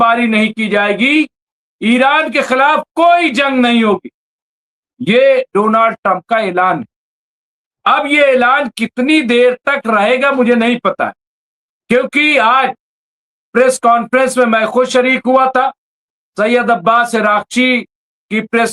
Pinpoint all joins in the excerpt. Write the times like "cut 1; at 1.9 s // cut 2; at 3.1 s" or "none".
none